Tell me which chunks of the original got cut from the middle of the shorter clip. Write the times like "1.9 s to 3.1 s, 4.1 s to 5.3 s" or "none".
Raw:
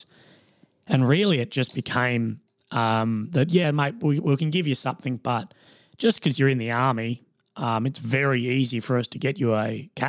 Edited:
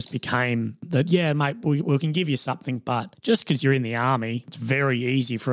2.9 s to 3.6 s, 5.5 s to 5.9 s, 7.3 s to 8.0 s